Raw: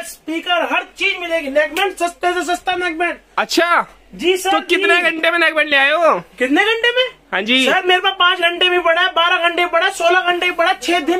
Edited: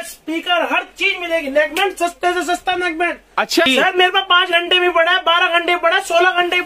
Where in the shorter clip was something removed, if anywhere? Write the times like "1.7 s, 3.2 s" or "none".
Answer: 3.7 s

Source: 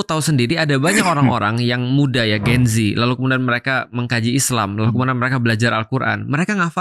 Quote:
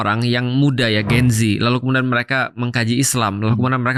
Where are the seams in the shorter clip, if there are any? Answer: none

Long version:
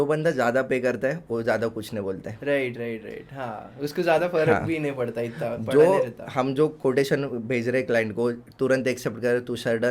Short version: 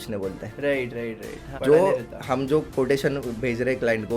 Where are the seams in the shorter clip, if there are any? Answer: 1.5 s

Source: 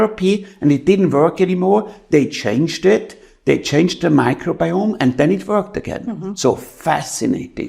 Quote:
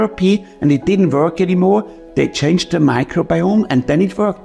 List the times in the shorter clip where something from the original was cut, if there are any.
1.9 s

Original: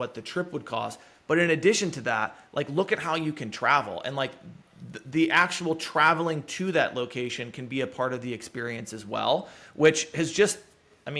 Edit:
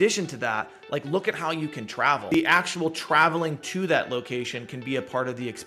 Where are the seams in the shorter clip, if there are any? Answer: 2.3 s

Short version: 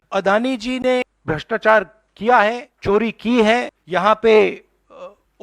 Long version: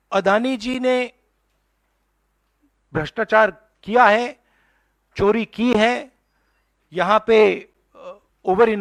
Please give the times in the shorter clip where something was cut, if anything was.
1.1 s, 2.7 s, 3.8 s

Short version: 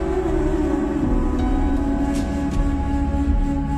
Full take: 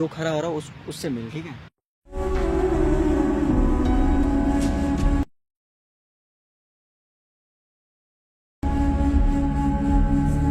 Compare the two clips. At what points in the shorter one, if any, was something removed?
2.8 s

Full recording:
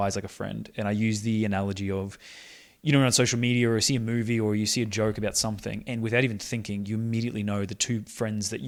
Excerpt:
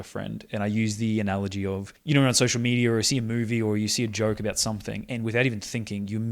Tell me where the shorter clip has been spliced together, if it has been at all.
1.9 s

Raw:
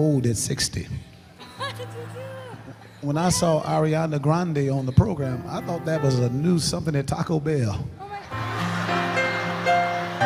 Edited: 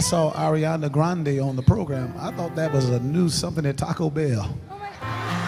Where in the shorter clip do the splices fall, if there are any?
none

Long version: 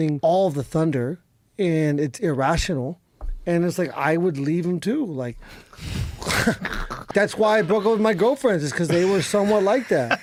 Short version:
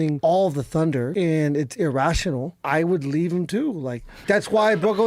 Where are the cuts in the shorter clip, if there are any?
1.1 s, 2.6 s, 4.1 s

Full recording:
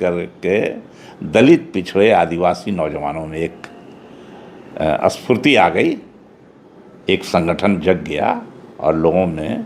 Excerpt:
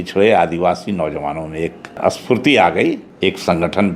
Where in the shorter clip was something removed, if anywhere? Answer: 2.0 s, 3.1 s

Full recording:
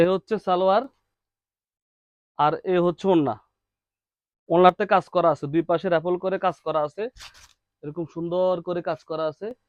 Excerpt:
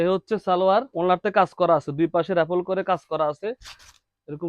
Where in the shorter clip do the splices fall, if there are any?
0.9 s

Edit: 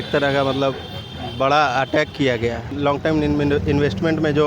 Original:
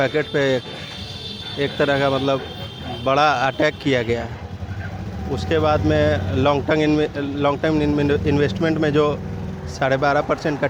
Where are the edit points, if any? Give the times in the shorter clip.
2.7 s

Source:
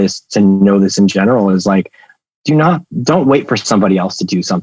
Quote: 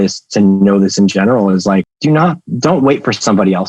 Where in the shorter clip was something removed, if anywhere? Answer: 1.9 s

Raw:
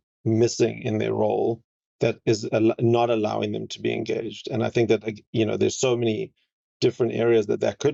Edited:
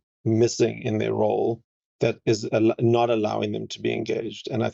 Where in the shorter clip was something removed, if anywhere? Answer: none

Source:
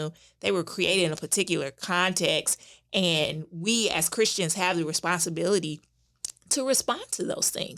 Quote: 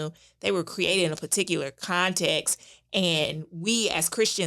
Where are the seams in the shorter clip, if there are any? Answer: none

